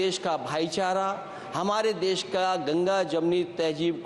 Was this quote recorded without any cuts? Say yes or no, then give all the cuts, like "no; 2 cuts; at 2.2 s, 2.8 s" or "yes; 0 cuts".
yes; 0 cuts